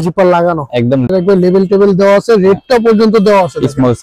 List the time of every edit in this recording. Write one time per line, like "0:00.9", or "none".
0:01.1